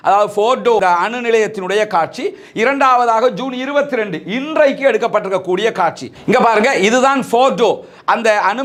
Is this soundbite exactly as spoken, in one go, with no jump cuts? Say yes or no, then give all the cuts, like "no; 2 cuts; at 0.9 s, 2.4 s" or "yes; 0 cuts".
yes; 0 cuts